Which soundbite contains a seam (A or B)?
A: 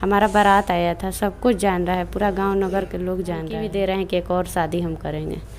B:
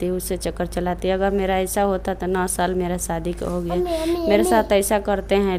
A